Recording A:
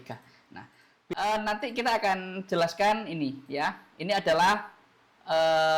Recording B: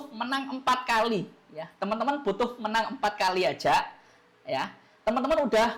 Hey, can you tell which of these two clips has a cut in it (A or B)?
A